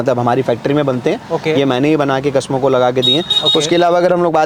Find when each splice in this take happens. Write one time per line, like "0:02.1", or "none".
none